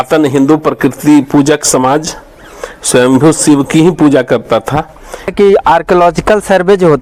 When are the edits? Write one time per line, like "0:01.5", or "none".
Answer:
0:05.3